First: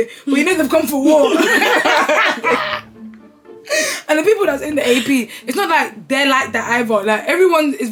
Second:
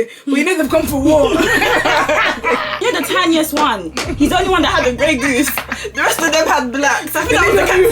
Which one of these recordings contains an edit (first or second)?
second